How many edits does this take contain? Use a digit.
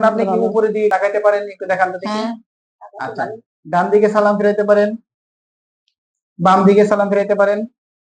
1